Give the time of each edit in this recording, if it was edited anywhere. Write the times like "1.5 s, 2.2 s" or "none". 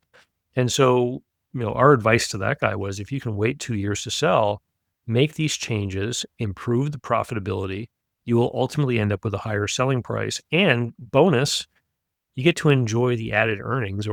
none